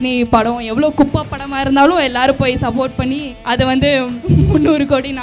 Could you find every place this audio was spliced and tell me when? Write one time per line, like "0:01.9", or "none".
0:03.3
0:04.2

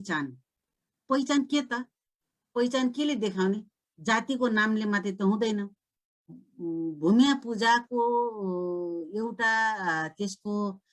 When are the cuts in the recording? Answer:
0:06.3

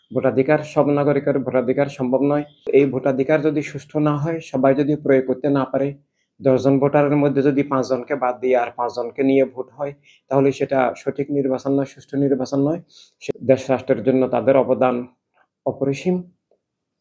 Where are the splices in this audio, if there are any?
0:02.7
0:13.3

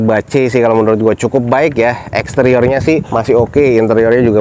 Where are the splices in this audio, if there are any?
0:03.1

